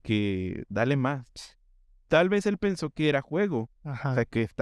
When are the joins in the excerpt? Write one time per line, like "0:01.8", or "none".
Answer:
none